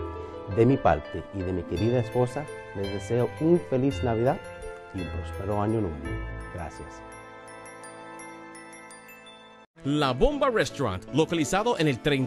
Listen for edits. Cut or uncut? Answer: cut